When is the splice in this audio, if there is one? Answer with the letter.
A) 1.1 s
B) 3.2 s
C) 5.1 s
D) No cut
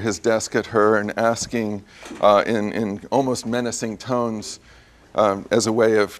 D